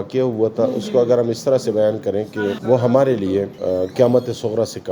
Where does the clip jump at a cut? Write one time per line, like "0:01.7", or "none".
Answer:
0:02.6
0:03.5